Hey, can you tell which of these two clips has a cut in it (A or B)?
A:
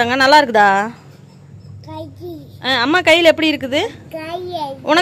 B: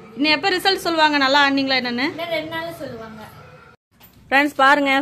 B